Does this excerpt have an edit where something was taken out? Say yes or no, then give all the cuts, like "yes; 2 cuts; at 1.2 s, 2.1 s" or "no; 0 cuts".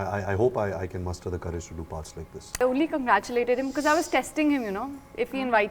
yes; 1 cut; at 2.6 s